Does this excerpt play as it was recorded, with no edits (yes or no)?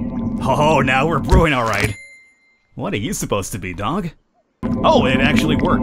no